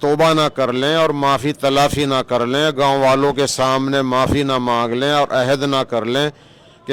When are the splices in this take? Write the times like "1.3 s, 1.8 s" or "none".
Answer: none